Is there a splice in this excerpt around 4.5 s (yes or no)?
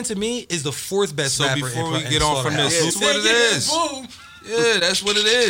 no